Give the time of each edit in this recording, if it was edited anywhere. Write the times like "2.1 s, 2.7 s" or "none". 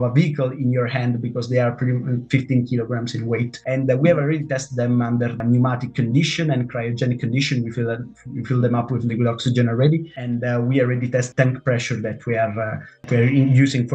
3.5 s, 5.4 s, 10.1 s, 11.3 s, 13.0 s